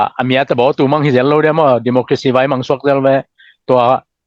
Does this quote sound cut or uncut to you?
uncut